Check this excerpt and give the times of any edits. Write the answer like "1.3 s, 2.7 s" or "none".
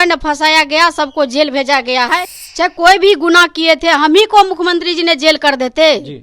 2.4 s